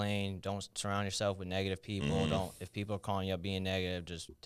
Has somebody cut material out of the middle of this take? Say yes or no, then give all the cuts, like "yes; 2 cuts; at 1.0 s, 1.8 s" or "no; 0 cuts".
no; 0 cuts